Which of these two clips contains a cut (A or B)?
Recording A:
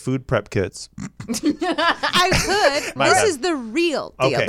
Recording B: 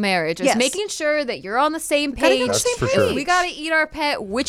A